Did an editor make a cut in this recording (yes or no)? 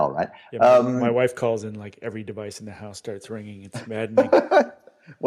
no